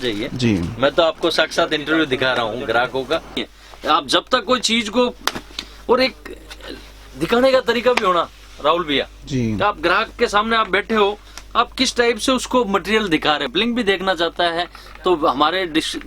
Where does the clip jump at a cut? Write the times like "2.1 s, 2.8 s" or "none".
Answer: 3.5 s, 13.4 s